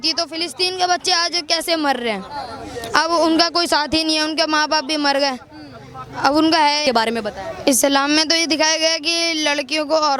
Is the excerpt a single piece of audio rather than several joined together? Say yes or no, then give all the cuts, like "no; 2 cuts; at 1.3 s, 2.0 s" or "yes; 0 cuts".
no; 1 cut; at 6.8 s